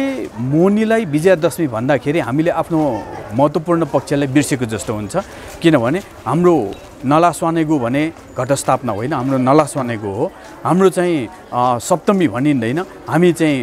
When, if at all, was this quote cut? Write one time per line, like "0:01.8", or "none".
none